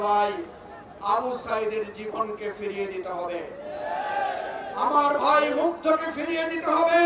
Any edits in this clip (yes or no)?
no